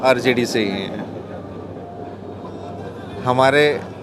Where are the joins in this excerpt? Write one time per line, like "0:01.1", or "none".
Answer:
none